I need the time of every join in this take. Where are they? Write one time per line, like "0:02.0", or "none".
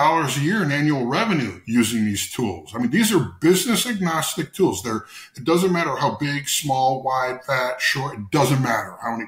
none